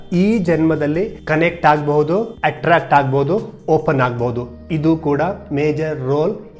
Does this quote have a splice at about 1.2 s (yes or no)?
yes